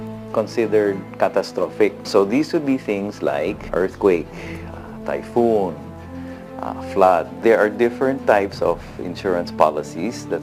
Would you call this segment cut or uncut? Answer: cut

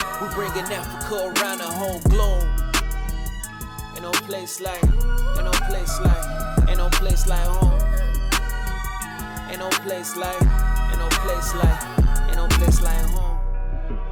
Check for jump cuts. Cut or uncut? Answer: uncut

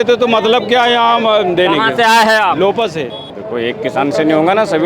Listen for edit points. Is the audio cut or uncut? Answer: cut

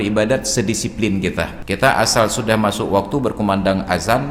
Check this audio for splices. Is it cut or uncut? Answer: cut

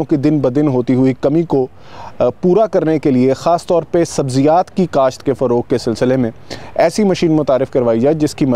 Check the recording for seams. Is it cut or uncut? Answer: uncut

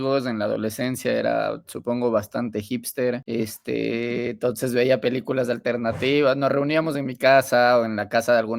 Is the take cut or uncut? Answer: cut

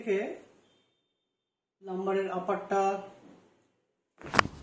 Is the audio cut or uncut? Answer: uncut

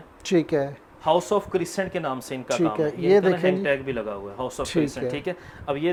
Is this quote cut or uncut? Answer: uncut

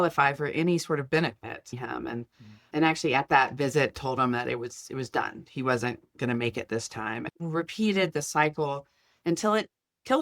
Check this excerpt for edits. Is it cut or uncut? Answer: cut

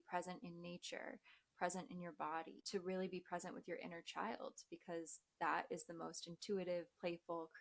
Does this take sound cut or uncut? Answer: cut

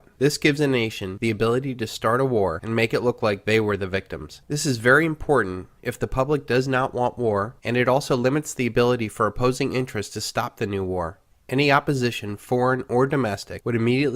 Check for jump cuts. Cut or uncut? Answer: uncut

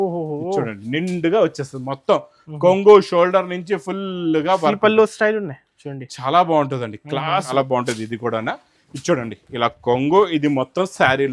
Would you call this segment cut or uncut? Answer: cut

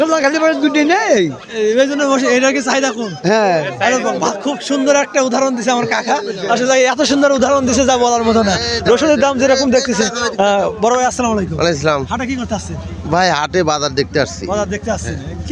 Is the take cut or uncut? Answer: uncut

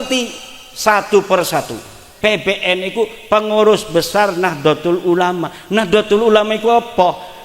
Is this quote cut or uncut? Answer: cut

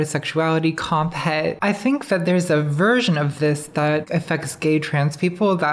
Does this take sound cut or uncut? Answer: cut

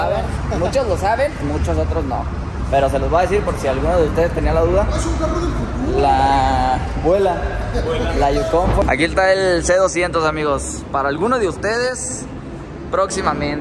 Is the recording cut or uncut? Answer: cut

